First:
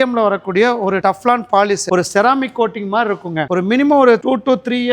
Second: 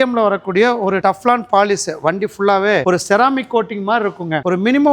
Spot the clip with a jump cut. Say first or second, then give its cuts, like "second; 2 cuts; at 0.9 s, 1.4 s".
first; 1 cut; at 1.9 s